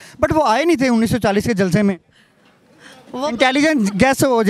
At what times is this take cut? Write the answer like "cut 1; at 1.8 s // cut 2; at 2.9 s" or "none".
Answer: none